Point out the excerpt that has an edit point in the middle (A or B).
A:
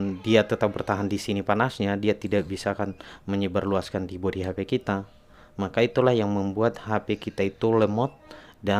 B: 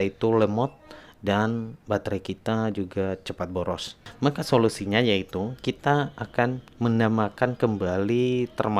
B